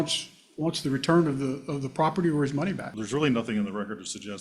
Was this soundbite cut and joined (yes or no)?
yes